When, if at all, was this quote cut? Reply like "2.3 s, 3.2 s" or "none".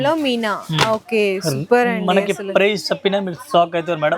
none